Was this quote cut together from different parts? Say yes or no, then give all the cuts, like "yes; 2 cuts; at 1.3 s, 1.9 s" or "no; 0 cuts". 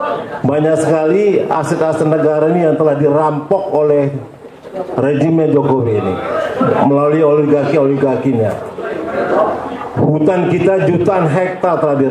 no; 0 cuts